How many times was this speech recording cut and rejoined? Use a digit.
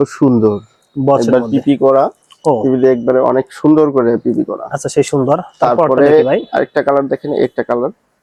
0